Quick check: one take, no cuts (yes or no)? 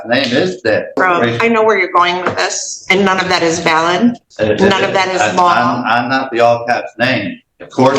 no